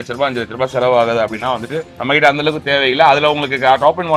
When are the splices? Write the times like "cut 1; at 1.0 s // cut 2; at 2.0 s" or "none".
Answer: cut 1; at 1.9 s